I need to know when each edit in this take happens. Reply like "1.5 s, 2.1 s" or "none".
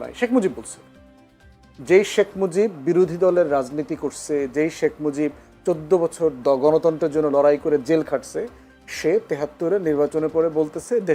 none